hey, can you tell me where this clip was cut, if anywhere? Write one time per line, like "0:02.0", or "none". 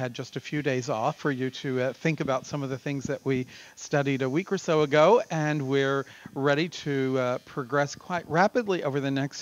0:04.3